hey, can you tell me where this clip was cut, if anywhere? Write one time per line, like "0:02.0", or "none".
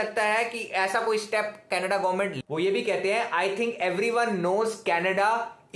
0:02.3